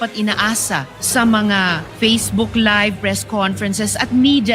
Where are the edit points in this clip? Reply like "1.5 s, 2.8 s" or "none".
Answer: 1.8 s